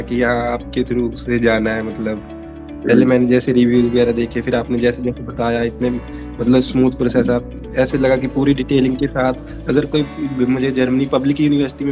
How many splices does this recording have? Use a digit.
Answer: 0